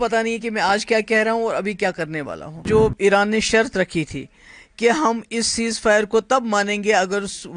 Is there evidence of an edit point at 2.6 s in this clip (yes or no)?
yes